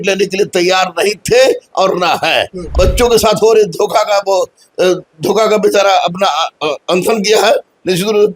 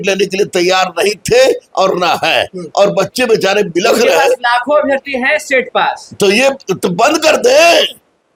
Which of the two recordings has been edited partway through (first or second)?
first